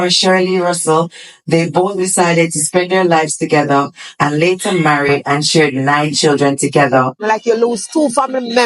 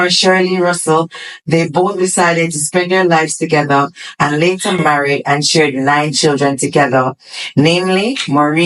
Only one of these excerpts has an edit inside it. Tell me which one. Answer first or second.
first